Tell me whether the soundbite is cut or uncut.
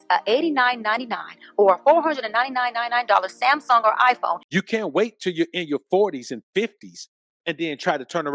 cut